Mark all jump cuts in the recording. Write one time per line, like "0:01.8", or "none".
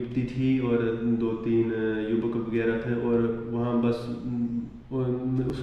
none